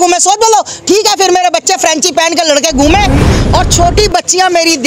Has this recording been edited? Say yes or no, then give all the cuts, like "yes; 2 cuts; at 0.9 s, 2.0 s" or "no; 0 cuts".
yes; 1 cut; at 3.3 s